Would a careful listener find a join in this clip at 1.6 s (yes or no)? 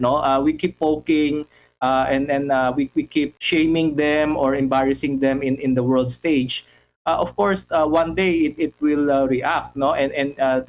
no